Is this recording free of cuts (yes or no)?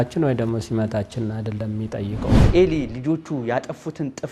no